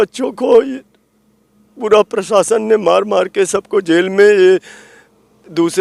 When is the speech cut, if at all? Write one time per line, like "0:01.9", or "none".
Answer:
none